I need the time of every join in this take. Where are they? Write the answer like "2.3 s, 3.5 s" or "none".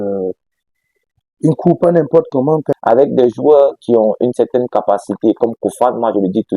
2.7 s